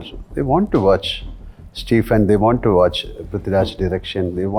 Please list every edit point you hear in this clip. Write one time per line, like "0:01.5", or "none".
none